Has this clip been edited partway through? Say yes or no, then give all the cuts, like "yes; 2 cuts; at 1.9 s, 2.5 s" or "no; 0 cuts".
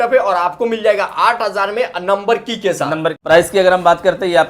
yes; 1 cut; at 3.2 s